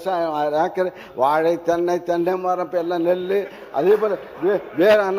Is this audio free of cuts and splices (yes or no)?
yes